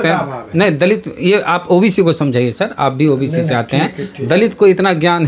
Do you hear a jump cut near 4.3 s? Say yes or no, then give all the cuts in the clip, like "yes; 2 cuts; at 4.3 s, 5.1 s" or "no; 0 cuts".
no; 0 cuts